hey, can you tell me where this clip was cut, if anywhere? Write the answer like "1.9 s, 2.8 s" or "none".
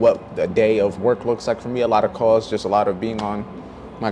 none